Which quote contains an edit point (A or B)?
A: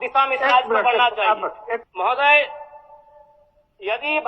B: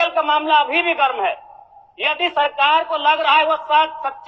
A